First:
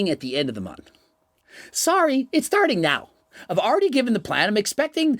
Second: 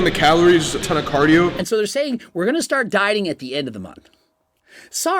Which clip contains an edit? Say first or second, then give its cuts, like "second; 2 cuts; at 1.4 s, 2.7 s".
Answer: second; 2 cuts; at 0.9 s, 1.6 s